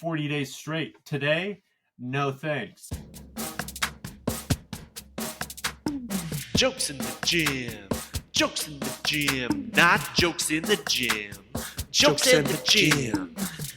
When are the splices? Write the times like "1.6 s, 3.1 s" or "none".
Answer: 2.8 s

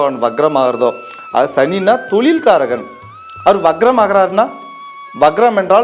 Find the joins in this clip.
none

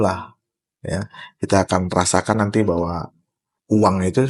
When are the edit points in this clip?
none

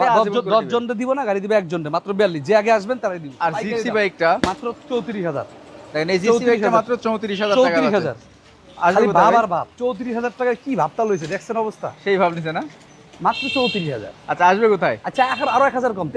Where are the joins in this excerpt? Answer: none

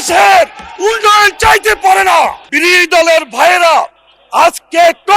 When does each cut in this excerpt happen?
2.5 s

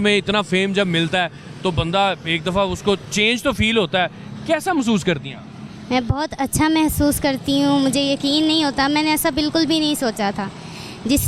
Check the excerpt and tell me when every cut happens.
none

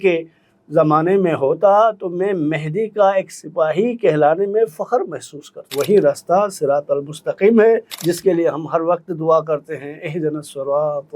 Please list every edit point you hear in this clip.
5.7 s, 7.9 s

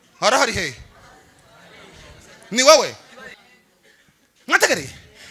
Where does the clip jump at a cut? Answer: 3.3 s

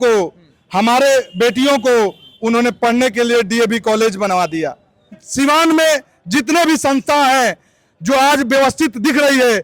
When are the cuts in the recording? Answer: 5.2 s

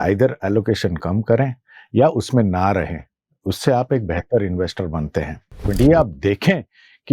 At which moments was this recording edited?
5.6 s

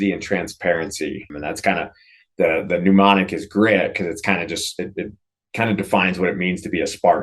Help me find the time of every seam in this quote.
1.3 s

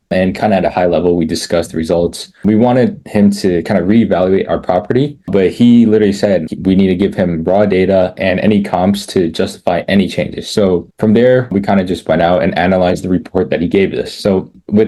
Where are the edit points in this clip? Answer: none

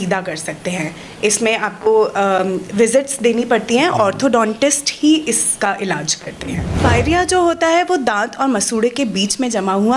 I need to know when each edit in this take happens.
6.7 s

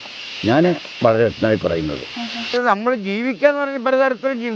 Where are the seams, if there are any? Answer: 2.5 s

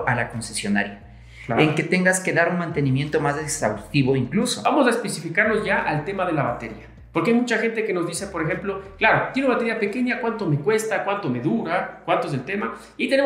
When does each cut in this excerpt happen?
4.6 s

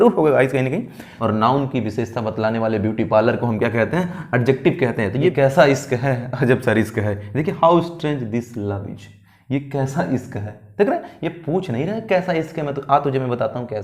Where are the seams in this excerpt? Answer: 1.1 s, 5.3 s

